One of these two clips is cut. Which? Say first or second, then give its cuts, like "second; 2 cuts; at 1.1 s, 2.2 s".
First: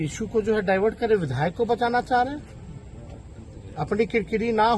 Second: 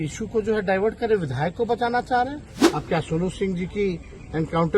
second; 1 cut; at 2.5 s